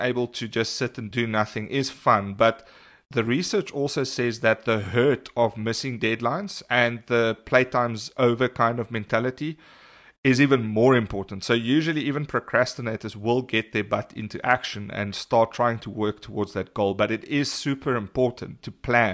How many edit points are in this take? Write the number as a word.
one